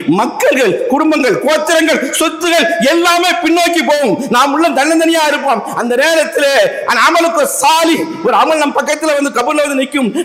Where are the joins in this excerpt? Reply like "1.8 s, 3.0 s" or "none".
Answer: none